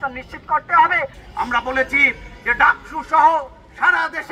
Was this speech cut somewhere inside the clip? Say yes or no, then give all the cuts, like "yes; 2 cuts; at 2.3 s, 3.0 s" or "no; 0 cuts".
yes; 1 cut; at 1.2 s